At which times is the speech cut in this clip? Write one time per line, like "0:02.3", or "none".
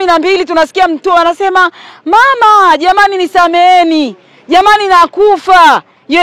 none